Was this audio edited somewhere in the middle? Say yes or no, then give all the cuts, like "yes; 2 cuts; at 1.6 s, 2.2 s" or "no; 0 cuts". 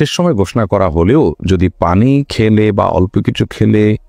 no; 0 cuts